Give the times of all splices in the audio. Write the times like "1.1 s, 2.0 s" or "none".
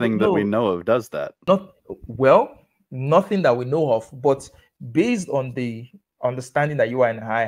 1.4 s